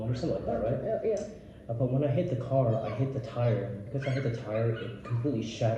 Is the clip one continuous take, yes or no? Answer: yes